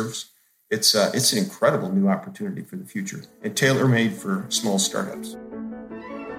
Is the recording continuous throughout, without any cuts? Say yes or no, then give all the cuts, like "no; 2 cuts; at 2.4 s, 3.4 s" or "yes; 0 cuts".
no; 1 cut; at 5.2 s